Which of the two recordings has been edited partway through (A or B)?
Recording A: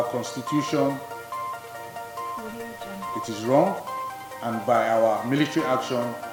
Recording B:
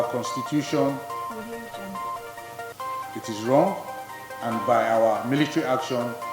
B